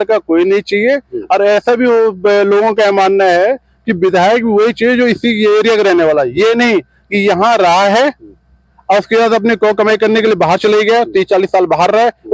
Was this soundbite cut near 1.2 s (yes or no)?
no